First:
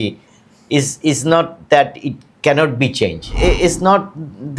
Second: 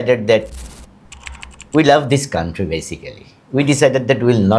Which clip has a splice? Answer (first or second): first